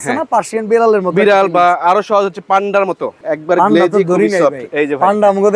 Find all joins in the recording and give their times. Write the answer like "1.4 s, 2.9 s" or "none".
3.2 s